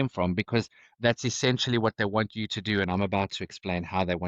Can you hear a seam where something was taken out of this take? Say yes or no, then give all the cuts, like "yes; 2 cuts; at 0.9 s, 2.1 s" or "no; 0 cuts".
no; 0 cuts